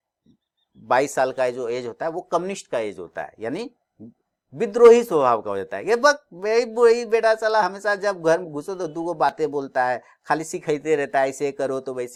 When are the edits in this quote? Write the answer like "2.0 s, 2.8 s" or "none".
none